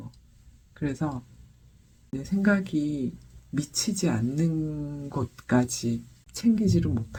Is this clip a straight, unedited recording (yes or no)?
yes